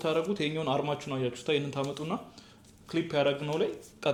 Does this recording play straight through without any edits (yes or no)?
yes